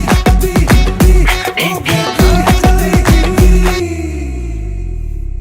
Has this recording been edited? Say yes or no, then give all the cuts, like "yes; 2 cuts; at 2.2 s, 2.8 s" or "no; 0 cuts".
yes; 1 cut; at 3.8 s